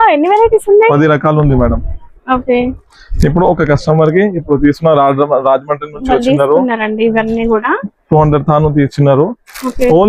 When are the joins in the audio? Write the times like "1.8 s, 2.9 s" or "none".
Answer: none